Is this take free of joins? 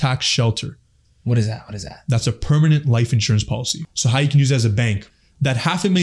no; 2 cuts; at 3.9 s, 5.1 s

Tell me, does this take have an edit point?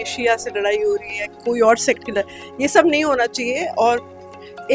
no; 0 cuts

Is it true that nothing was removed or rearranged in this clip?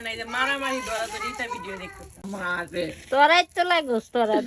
no; 1 cut; at 2.2 s

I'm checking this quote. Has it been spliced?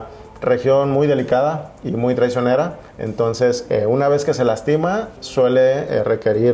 no; 0 cuts

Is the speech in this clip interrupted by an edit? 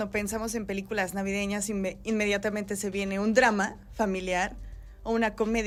no; 0 cuts

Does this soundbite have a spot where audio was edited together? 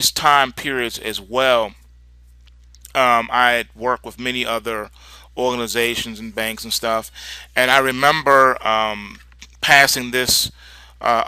yes; 1 cut; at 4.6 s

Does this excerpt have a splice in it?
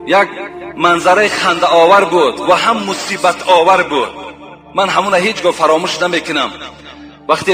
no; 0 cuts

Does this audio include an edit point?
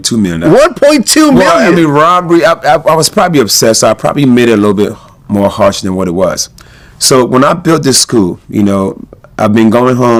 no; 0 cuts

